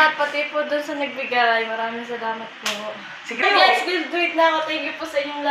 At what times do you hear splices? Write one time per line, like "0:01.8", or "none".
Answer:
0:03.4